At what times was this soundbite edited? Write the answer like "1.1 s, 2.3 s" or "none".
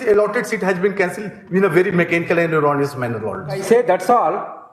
3.6 s